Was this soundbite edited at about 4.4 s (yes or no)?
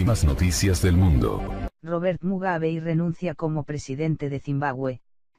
no